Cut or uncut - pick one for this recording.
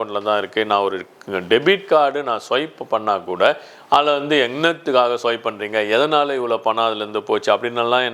uncut